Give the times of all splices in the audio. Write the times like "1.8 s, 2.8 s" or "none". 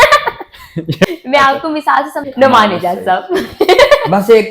1.0 s, 2.2 s